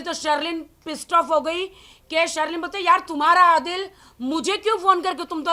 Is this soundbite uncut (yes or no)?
yes